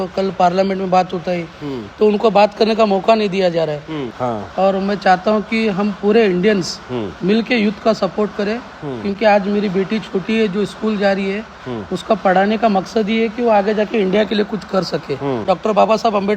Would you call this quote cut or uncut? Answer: cut